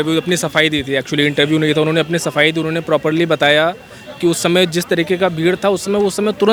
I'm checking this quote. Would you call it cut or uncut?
uncut